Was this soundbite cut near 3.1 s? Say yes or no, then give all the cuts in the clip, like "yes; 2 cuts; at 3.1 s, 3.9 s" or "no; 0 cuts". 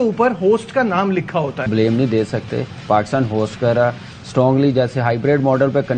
no; 1 cut; at 1.7 s